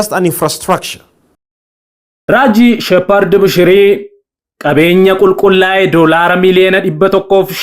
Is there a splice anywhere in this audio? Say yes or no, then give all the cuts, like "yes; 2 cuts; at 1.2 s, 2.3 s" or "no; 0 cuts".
no; 0 cuts